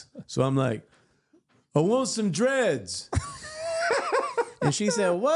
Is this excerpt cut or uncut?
uncut